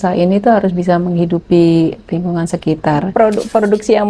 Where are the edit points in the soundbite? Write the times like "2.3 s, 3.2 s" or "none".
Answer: 3.1 s